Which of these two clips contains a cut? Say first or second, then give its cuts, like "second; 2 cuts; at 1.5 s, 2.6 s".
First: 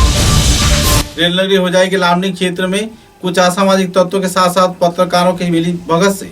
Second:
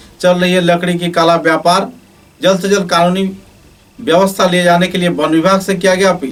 first; 1 cut; at 1.1 s